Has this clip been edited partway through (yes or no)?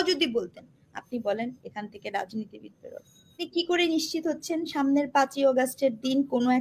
yes